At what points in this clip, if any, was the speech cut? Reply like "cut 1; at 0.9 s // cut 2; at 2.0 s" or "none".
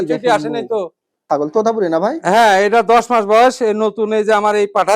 cut 1; at 1.1 s